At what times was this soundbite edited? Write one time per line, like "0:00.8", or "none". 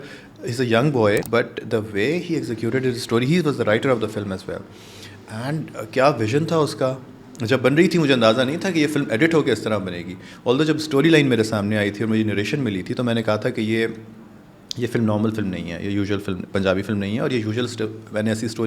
0:01.2